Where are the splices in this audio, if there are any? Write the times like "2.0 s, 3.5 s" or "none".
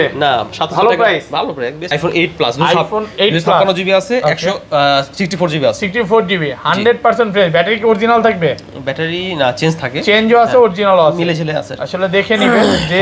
1.9 s